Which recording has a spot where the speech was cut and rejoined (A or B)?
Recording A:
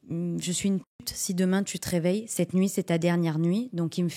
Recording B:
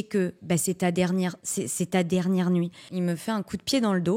B